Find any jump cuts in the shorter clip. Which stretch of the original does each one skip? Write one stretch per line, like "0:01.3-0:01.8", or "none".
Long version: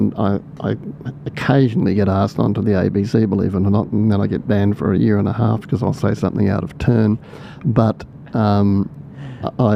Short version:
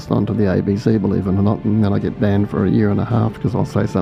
none